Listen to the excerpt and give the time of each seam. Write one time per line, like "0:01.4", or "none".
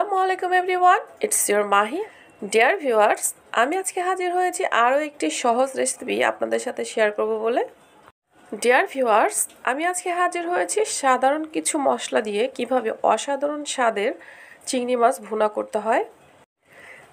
0:02.0